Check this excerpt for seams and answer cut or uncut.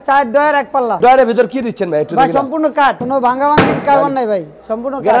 cut